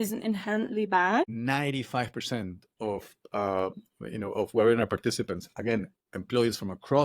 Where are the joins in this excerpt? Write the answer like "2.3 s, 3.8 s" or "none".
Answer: 1.3 s